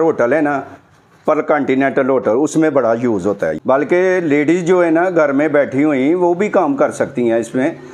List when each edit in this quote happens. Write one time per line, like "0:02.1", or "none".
0:03.6